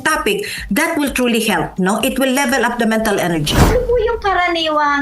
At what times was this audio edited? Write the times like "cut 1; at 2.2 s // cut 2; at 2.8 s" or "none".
cut 1; at 3.7 s